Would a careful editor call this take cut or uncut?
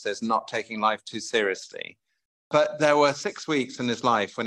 uncut